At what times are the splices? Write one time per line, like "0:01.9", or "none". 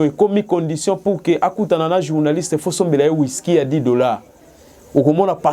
none